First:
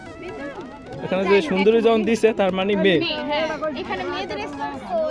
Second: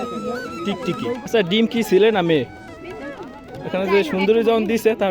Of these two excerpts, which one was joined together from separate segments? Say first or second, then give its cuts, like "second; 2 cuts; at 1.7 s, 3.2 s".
second; 1 cut; at 1.3 s